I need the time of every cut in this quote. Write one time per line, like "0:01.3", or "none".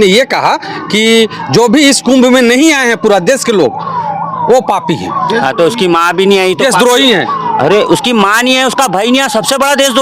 none